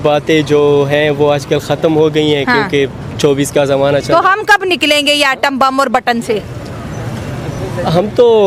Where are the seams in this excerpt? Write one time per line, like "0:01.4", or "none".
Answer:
none